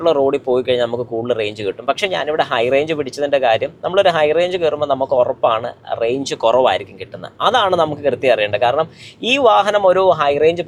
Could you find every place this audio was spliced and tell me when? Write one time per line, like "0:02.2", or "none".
none